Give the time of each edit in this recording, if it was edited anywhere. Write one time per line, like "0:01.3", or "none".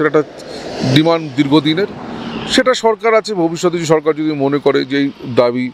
none